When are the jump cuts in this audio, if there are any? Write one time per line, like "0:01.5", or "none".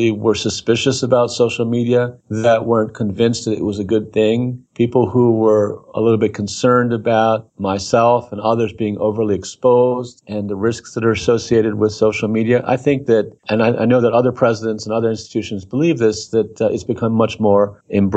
none